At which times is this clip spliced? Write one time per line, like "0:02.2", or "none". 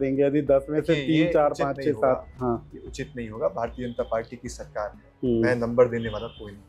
none